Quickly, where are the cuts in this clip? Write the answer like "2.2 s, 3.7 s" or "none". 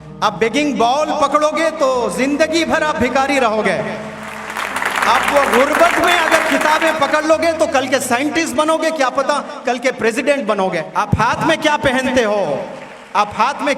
10.9 s